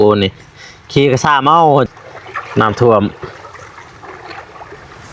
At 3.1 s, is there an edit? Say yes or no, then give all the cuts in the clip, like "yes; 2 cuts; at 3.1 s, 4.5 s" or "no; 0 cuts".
no; 1 cut; at 1.9 s